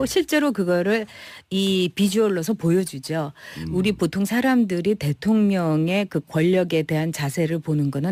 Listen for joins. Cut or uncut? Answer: uncut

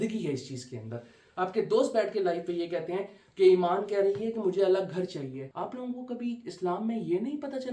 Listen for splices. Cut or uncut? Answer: cut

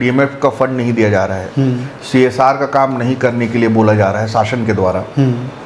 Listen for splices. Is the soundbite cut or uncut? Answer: uncut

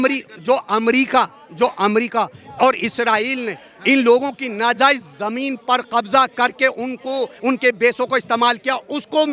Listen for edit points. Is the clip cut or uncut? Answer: uncut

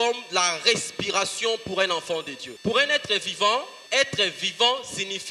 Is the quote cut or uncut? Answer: cut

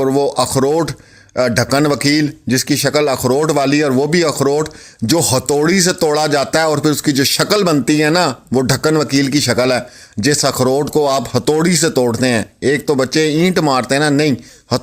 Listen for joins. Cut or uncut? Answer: uncut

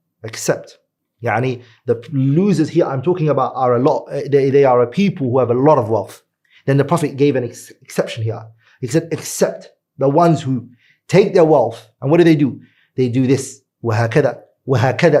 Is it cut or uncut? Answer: uncut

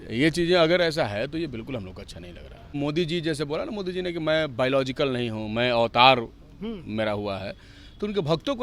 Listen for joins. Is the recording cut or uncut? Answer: cut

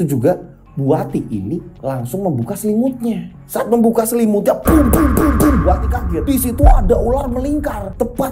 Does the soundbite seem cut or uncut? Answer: uncut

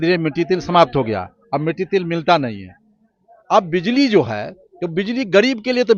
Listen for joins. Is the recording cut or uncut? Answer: uncut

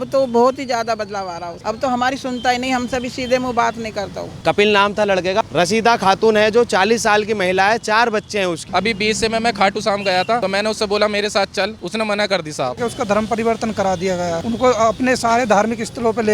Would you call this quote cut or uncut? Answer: cut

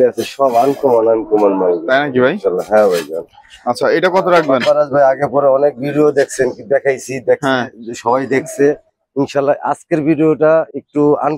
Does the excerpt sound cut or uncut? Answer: uncut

